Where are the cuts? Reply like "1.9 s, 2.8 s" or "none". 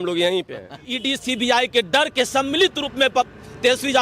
0.9 s